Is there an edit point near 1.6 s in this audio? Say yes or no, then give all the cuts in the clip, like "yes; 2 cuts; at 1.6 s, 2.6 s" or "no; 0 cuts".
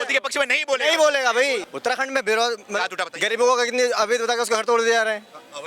yes; 1 cut; at 1.6 s